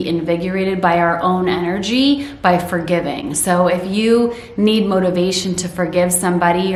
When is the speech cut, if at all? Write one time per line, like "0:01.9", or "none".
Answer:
none

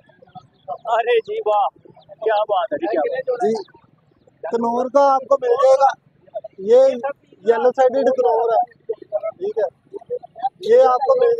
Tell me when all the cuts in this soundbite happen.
none

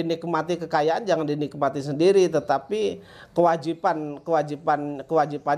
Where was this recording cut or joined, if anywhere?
none

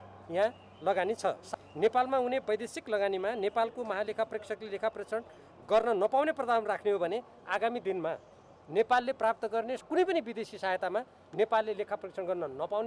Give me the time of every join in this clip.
0:01.4

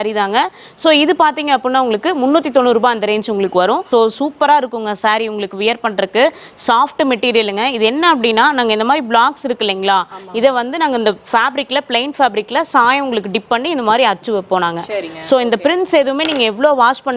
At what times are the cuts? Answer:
0:03.8

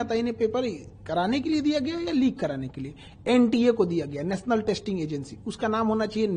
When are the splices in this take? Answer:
none

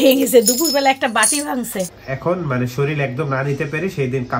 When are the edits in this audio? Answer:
0:02.0

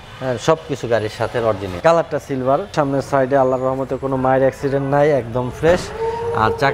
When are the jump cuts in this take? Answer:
0:01.7
0:02.7

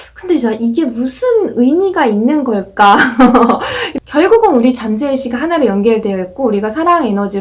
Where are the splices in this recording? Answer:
0:03.9

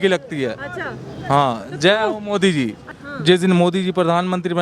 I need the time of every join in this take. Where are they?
0:02.9

